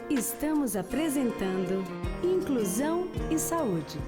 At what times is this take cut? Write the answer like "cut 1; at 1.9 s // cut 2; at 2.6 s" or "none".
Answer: none